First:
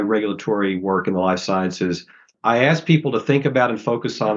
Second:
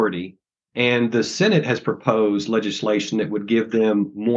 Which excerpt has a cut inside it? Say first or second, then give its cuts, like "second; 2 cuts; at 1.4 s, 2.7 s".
first; 1 cut; at 2.3 s